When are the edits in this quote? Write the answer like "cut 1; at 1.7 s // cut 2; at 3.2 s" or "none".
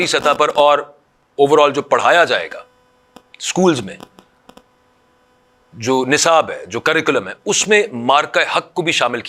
none